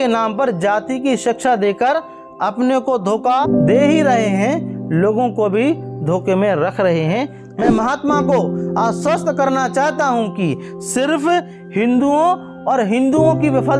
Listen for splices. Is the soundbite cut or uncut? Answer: cut